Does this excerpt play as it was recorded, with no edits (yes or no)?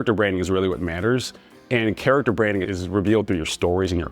no